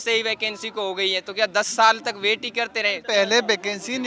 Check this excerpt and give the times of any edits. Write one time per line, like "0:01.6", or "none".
0:03.0